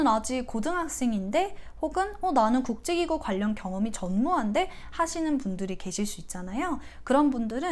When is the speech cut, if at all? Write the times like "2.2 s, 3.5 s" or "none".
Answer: none